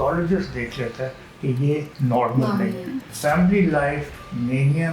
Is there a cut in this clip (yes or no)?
yes